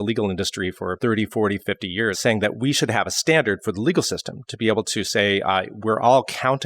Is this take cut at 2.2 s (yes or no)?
yes